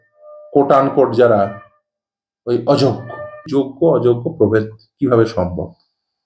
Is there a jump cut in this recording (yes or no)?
yes